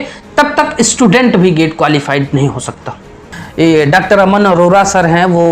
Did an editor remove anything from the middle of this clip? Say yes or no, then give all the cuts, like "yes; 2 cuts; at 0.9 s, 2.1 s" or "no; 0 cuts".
yes; 1 cut; at 3.4 s